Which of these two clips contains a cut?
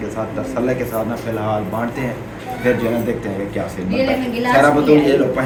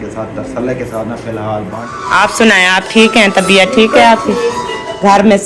second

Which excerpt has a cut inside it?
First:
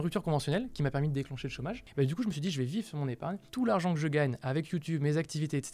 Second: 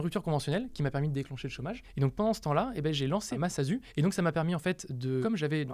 first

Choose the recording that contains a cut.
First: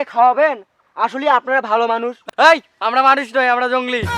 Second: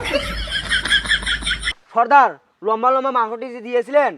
second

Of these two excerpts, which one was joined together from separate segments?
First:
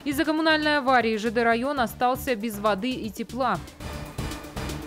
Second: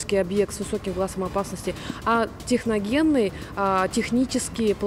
first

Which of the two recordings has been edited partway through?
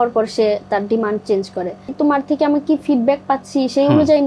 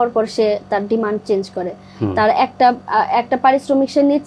first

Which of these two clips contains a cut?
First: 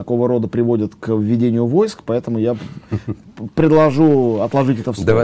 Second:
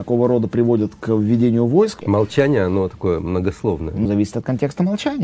second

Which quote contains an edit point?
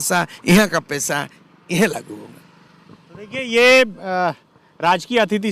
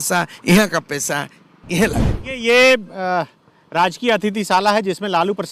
second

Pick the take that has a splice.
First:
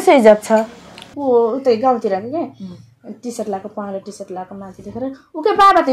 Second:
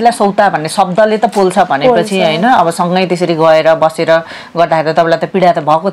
first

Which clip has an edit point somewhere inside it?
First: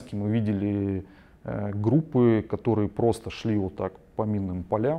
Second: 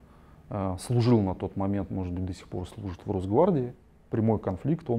second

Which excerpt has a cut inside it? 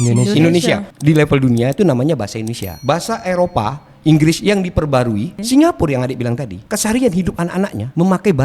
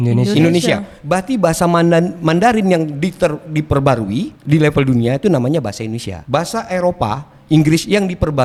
first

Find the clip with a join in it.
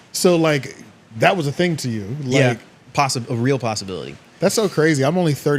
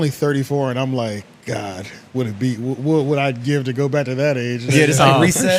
first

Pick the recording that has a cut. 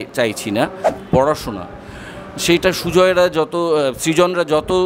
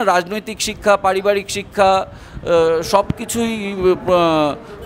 first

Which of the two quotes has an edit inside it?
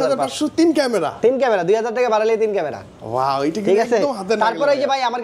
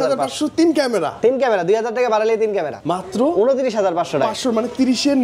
second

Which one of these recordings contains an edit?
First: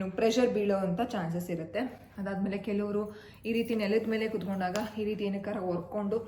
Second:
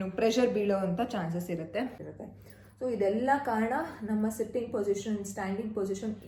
second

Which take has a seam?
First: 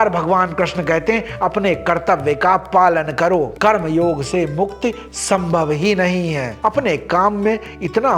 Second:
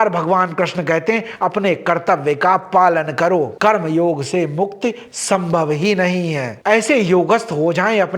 second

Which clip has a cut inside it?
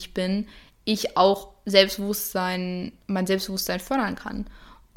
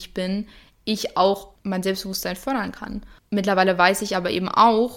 second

